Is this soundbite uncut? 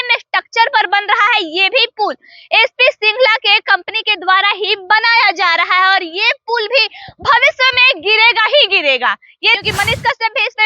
no; 1 cut; at 9.6 s

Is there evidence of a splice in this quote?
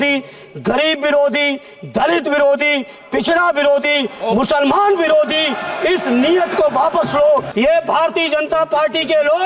yes; 1 cut; at 7.5 s

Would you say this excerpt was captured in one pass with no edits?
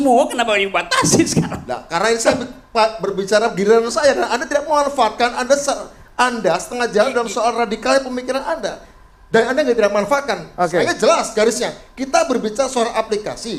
yes; 0 cuts

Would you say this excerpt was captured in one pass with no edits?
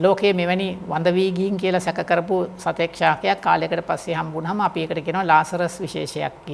yes; 0 cuts

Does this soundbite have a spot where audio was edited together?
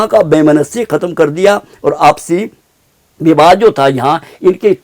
no; 0 cuts

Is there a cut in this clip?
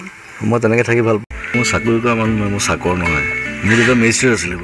yes; 1 cut; at 1.4 s

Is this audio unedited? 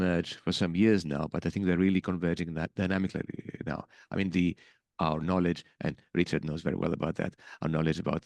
yes; 0 cuts

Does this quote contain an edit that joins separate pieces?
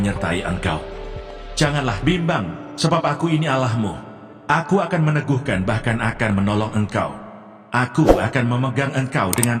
no; 0 cuts

